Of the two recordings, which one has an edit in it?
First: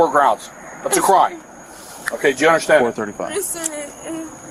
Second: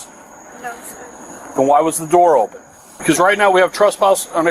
second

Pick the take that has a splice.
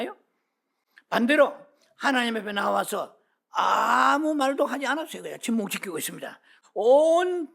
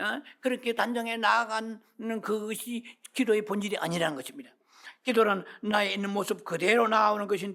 first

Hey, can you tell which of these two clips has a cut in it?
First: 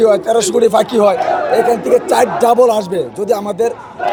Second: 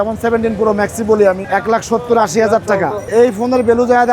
second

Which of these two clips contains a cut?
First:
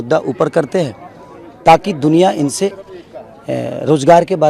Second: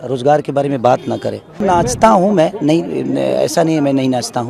second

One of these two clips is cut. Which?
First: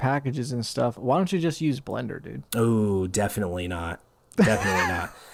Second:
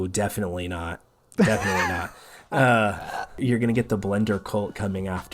second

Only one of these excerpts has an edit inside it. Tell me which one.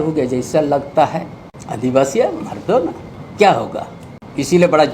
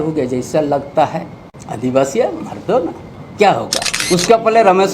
second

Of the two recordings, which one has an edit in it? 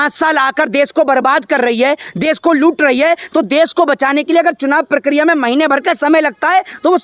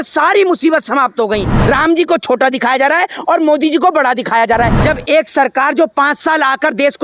second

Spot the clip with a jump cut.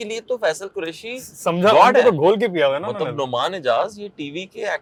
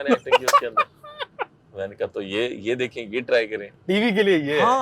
second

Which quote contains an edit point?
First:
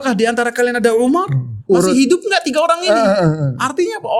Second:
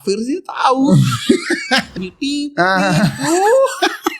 second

